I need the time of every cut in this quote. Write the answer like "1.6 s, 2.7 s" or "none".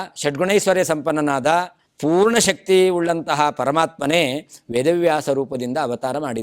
1.8 s